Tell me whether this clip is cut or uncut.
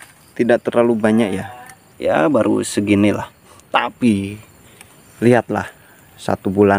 uncut